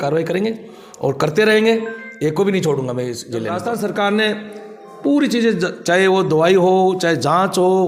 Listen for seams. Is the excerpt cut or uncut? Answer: cut